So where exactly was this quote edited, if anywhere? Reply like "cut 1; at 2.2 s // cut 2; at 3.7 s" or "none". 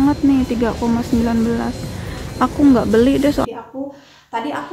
cut 1; at 3.4 s